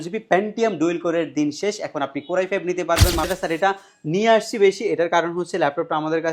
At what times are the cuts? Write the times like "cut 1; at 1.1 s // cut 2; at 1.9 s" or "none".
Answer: cut 1; at 3.3 s